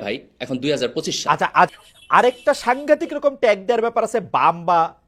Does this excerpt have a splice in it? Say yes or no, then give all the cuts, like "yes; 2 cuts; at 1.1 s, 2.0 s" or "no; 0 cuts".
yes; 1 cut; at 1.7 s